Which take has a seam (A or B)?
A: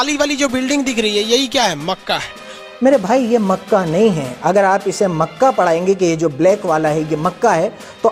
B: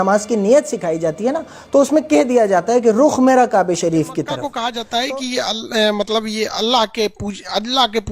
B